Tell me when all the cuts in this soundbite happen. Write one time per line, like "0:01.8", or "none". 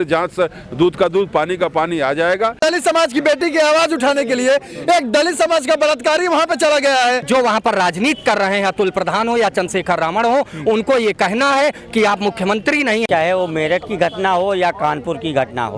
0:02.6
0:07.2
0:13.0